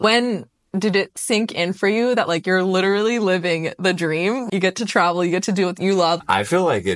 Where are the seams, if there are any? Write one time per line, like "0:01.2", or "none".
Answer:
0:01.1
0:04.4
0:06.2